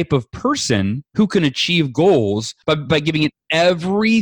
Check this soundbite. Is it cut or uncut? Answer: cut